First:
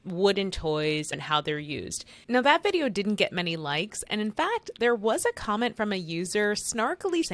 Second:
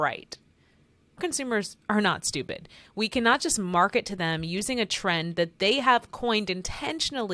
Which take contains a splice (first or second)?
second